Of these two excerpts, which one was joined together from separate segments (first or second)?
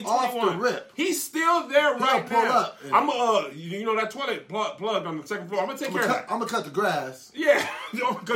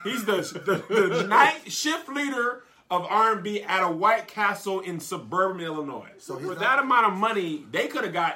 second